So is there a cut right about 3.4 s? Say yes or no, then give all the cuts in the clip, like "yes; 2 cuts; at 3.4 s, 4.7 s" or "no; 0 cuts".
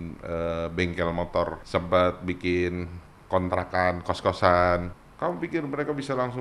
no; 2 cuts; at 1.6 s, 4.9 s